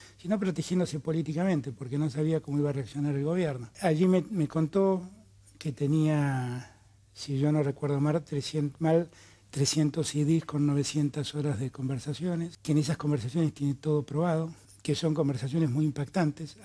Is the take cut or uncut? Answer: cut